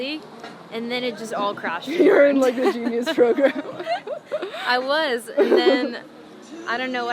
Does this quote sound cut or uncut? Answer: uncut